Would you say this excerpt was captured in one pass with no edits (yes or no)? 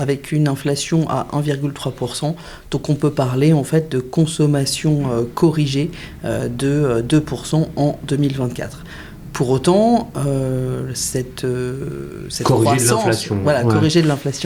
yes